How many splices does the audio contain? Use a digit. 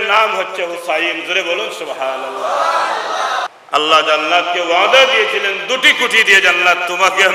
1